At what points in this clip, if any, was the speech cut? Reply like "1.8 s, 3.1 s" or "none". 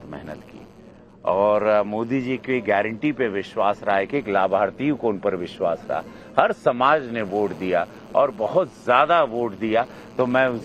none